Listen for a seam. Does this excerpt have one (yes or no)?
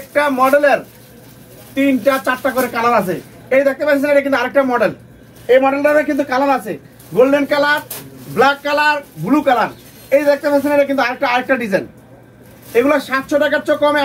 no